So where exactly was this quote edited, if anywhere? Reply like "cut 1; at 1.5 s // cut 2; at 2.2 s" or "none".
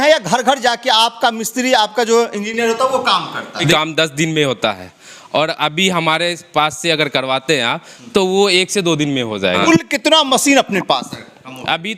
cut 1; at 3.7 s // cut 2; at 9.6 s